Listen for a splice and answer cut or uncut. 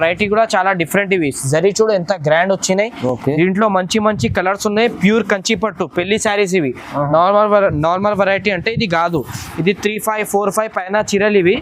uncut